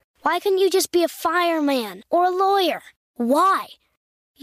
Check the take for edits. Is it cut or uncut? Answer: uncut